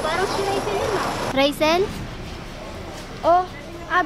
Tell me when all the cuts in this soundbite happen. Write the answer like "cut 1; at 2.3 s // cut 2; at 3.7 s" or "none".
cut 1; at 1.3 s